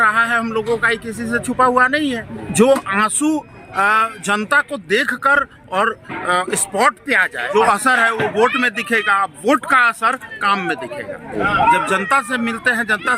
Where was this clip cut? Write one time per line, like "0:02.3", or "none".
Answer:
0:02.4
0:07.5
0:11.3

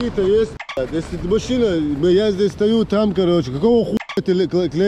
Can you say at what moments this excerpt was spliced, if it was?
none

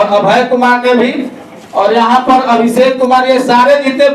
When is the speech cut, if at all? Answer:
none

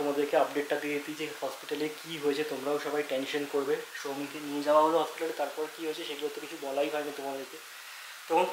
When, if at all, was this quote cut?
none

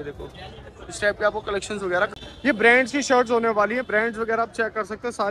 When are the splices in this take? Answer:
0:02.1

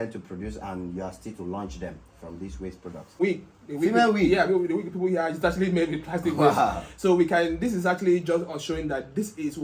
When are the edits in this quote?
0:03.2

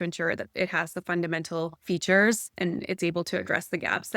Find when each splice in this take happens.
0:01.8
0:02.5

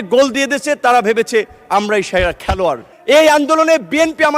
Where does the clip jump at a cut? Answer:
0:02.9

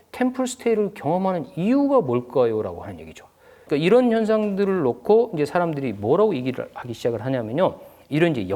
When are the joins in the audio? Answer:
0:03.6

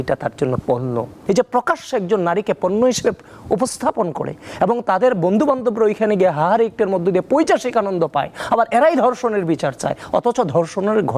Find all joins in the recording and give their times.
0:01.2

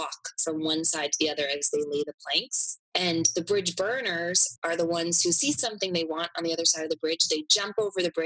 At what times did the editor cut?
none

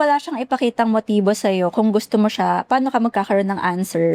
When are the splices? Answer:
none

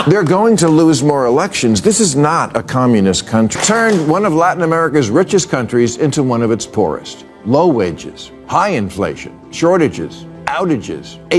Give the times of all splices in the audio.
0:03.6

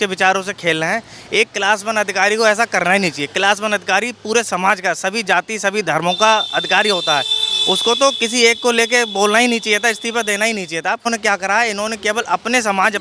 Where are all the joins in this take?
0:11.1

